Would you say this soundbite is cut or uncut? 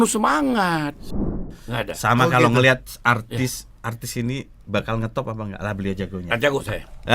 cut